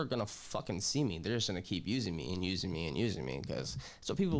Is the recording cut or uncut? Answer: uncut